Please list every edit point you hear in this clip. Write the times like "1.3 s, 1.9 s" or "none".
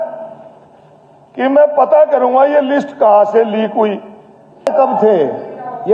4.7 s